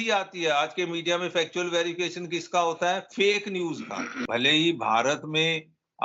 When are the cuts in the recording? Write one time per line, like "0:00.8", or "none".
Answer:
0:04.2